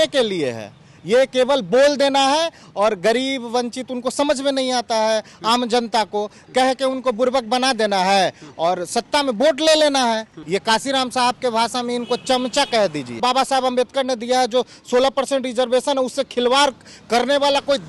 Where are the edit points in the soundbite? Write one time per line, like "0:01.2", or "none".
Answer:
0:10.3
0:13.2